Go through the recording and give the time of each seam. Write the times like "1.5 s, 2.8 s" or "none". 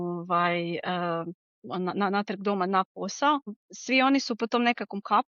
3.7 s